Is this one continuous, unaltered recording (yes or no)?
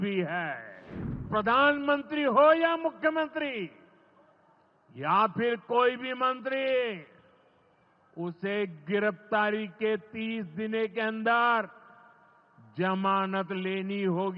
no